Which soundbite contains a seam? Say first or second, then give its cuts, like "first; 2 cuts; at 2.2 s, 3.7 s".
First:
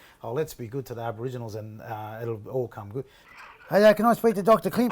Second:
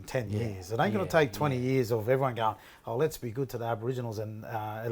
first; 1 cut; at 3.2 s